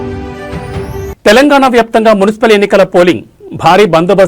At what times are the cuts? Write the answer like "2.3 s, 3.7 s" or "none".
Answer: none